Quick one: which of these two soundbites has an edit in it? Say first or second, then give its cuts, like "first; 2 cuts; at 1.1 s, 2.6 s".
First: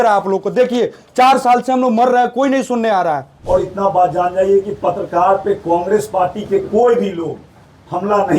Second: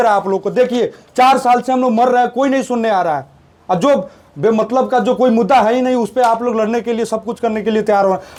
first; 1 cut; at 3.3 s